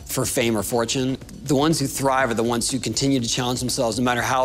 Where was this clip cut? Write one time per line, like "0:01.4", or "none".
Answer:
0:01.2